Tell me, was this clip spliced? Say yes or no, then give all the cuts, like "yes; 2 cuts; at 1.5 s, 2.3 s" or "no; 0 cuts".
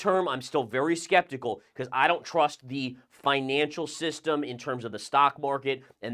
no; 0 cuts